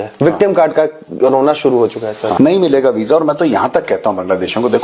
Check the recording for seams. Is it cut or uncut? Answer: cut